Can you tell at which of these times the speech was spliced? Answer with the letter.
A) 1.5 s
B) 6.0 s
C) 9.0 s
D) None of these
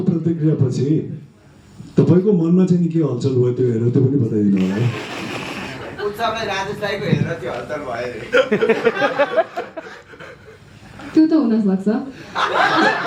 D